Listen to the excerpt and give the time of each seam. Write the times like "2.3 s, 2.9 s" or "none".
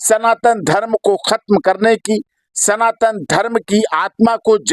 none